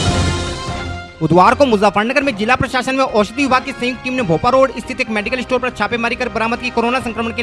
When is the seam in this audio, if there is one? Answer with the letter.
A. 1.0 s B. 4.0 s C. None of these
A